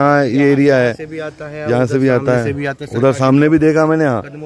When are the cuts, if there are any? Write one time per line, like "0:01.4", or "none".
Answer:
none